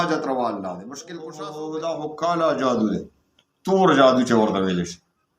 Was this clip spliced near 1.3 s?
yes; 1 cut; at 1.3 s

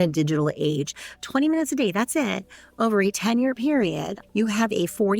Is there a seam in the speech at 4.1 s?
yes; 2 cuts; at 1.2 s, 4.1 s

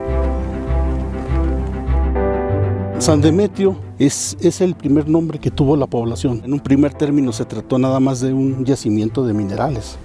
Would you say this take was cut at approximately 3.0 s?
yes; 2 cuts; at 0.9 s, 3.0 s

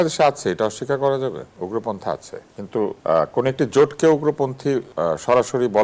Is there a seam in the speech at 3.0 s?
yes; 3 cuts; at 1.5 s, 3.0 s, 4.9 s

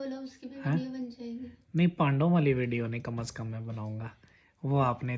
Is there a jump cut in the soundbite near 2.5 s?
no; 0 cuts

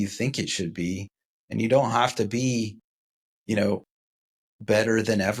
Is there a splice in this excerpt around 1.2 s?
no; 0 cuts

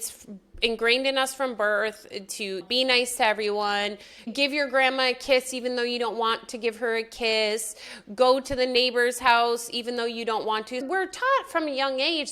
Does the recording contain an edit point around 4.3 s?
yes; 2 cuts; at 4.3 s, 10.8 s

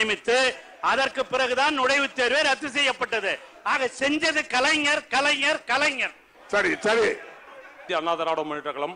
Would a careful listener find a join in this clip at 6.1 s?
no; 0 cuts

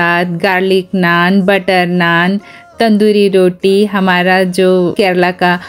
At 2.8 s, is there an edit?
no; 0 cuts

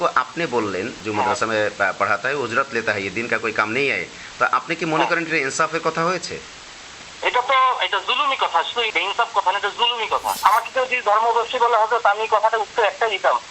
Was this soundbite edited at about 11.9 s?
no; 2 cuts; at 8.9 s, 10.4 s

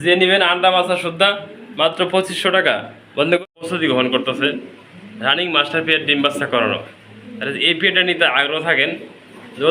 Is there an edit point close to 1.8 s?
no; 1 cut; at 3.4 s

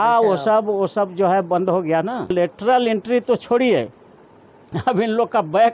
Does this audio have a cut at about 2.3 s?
yes; 1 cut; at 2.3 s

